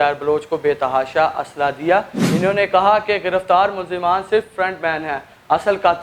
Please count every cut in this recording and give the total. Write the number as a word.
one